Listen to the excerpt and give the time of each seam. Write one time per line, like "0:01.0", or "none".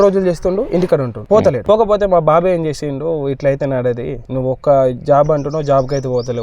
0:01.3
0:04.2